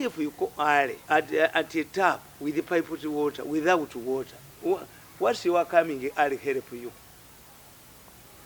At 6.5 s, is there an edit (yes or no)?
no